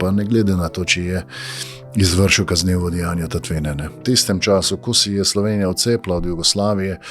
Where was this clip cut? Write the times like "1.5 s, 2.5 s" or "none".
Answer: 3.9 s